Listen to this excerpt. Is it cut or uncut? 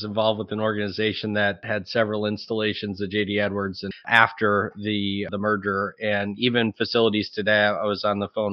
cut